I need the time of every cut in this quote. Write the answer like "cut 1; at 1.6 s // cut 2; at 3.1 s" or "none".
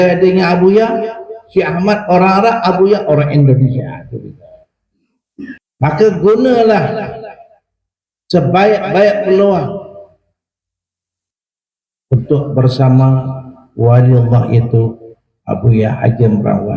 cut 1; at 5.7 s